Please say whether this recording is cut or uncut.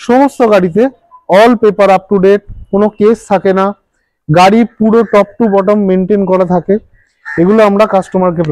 uncut